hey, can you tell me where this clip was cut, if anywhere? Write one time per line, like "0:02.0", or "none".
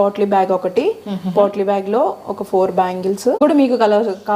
0:03.4